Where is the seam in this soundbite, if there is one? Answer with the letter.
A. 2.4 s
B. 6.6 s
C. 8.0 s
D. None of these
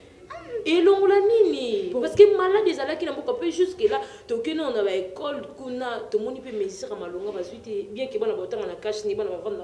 D